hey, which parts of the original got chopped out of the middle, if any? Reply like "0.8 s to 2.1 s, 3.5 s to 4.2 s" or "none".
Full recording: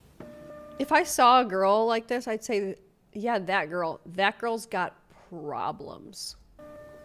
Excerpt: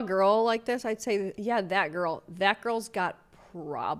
2.8 s to 3.1 s